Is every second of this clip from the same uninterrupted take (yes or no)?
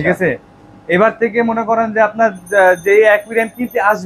yes